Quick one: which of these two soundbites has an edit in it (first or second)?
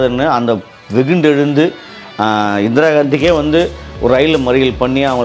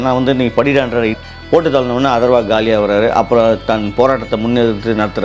second